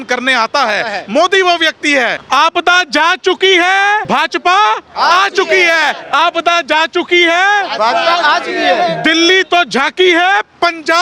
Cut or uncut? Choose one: cut